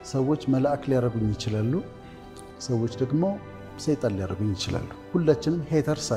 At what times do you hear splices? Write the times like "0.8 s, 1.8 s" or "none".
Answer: none